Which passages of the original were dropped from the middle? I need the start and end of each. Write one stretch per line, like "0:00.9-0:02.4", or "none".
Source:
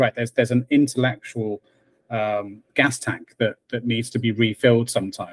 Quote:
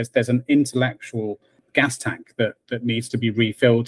0:01.8-0:02.6